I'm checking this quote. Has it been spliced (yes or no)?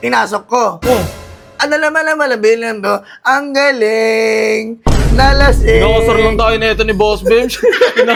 no